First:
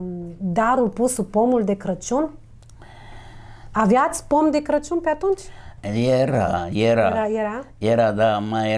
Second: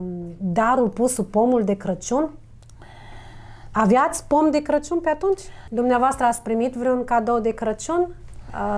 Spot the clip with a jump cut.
second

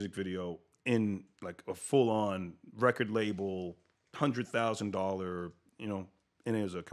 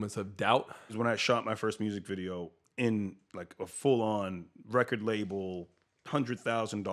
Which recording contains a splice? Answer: second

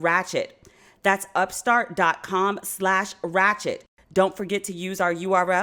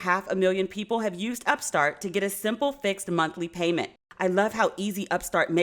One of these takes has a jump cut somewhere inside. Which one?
second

